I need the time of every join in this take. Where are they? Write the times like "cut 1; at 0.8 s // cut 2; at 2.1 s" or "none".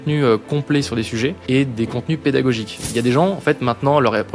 cut 1; at 1.4 s // cut 2; at 2.8 s